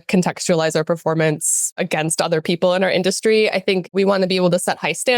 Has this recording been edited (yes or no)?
yes